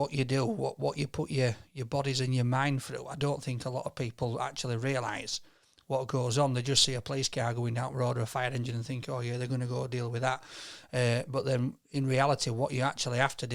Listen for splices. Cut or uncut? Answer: uncut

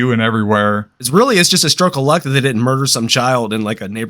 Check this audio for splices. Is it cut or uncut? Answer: cut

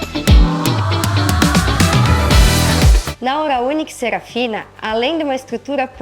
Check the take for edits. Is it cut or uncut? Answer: cut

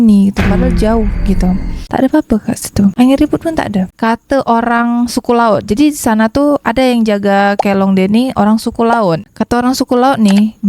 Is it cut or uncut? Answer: cut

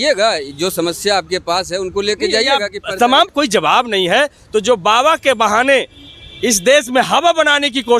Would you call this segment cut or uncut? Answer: cut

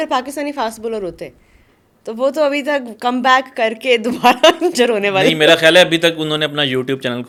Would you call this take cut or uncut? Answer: uncut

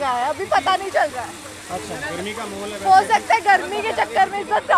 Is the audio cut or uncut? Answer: uncut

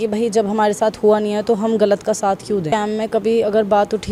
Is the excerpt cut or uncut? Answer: uncut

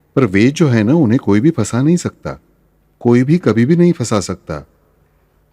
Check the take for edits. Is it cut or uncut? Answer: uncut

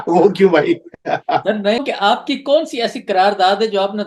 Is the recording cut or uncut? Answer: cut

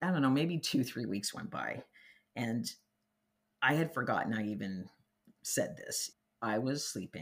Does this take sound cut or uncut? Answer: cut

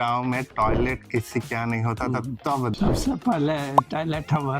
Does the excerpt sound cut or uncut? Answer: cut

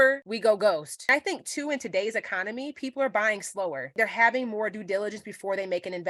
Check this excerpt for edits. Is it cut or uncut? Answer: cut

